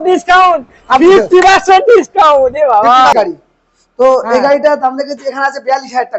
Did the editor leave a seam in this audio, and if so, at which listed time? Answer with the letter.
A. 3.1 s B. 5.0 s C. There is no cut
A